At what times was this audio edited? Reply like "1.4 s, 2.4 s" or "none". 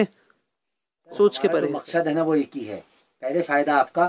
1.6 s